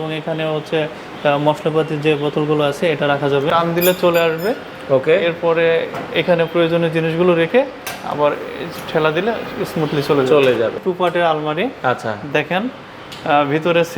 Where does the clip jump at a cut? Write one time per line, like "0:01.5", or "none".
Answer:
0:03.5
0:10.8